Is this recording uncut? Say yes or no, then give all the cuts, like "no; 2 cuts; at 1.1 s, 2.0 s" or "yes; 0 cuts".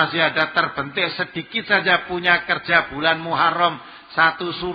yes; 0 cuts